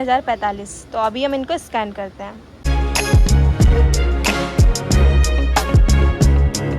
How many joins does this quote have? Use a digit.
1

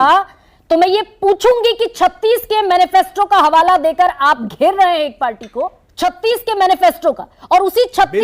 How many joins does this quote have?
1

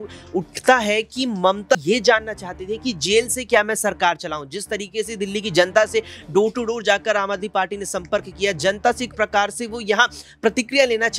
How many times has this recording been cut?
1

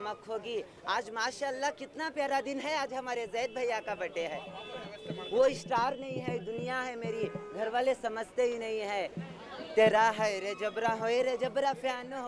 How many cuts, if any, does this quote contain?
0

